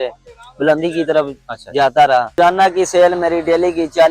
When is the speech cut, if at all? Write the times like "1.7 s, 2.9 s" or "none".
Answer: 2.3 s